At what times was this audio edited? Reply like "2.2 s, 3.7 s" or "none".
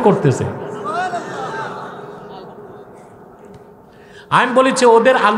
none